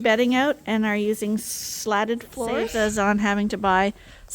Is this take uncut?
no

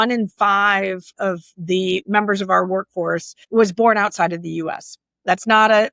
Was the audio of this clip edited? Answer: yes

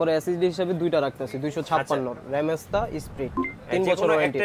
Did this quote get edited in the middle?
no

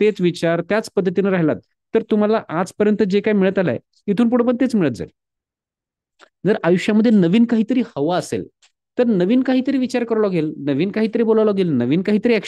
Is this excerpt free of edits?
yes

